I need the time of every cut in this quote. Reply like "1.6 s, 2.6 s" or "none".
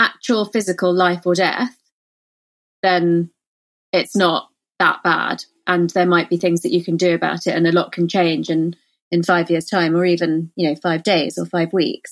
none

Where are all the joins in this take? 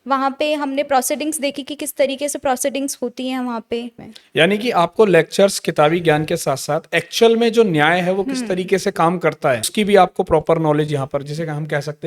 4.1 s, 9.6 s

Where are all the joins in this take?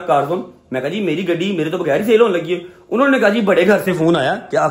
none

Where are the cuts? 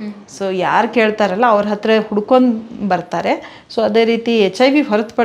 none

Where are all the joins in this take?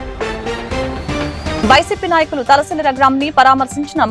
1.6 s

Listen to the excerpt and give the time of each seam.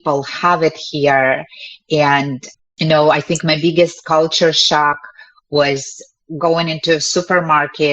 2.4 s

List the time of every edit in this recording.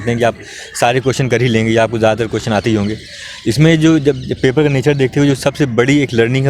none

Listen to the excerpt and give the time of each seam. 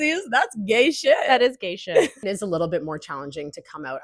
2.2 s

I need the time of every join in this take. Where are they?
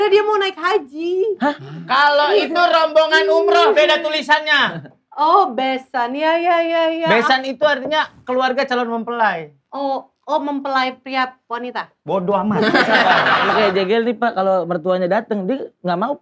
13.5 s

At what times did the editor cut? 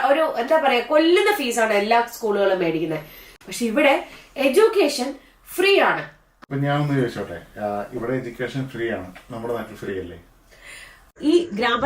6.3 s, 11.0 s

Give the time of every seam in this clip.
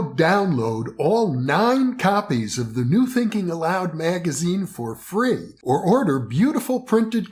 none

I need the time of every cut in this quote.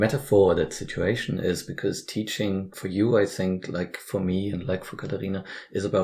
2.8 s

